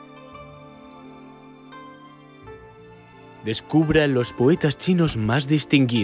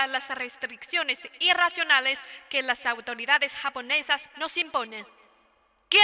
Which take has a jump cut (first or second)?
first